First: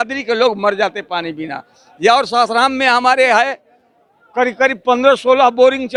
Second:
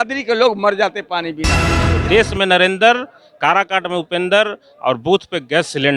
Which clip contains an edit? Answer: second; 1 cut; at 1.8 s

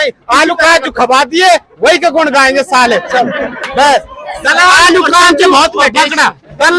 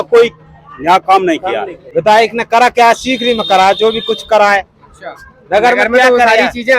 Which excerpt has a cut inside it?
second; 1 cut; at 1.8 s

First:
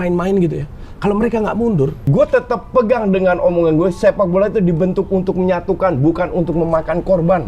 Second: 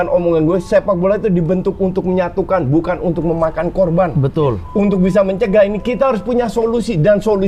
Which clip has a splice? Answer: first; 1 cut; at 2.0 s

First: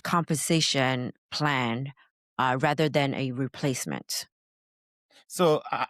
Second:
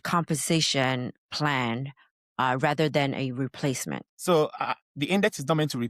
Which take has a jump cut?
second; 1 cut; at 4.1 s

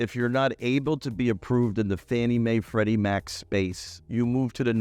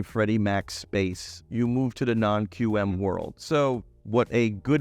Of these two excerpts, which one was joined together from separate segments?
second; 1 cut; at 3.3 s

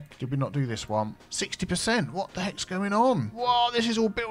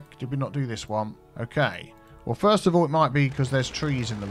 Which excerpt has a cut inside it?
first; 2 cuts; at 1.2 s, 3.3 s

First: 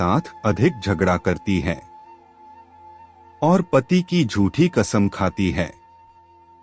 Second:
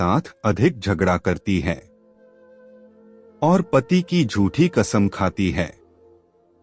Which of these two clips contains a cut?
second; 2 cuts; at 1.9 s, 3.4 s

